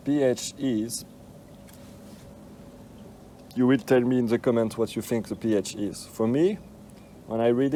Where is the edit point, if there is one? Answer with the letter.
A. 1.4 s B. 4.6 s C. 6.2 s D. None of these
D